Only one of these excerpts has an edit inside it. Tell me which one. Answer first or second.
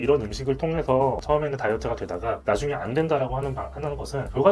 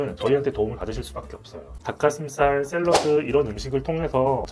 second